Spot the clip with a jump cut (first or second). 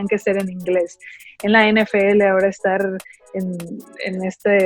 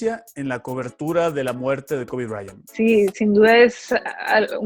second